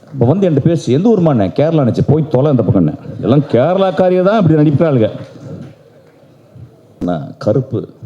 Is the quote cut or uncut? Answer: cut